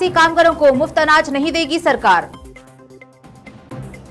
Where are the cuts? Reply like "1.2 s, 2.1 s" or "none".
none